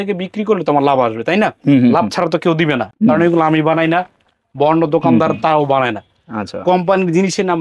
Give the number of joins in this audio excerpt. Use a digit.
0